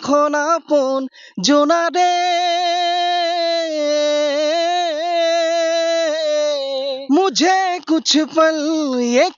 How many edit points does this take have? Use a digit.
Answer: 1